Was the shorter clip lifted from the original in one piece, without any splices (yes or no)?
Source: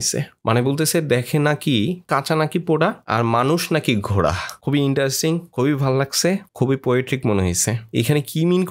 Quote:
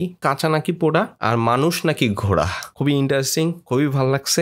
yes